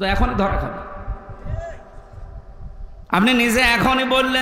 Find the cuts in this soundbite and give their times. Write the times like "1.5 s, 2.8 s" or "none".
2.9 s